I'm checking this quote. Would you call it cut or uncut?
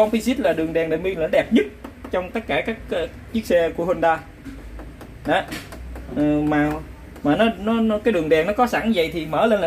uncut